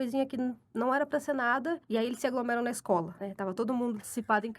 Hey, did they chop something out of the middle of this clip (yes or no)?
yes